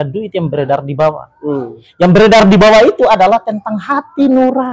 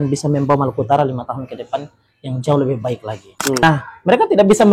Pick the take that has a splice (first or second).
second